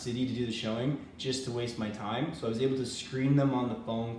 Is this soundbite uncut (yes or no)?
yes